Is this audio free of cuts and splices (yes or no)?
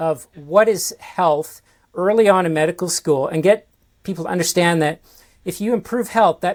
yes